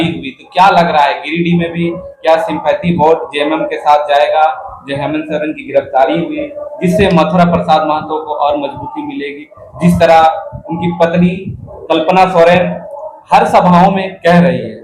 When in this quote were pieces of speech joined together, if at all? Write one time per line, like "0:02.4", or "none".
none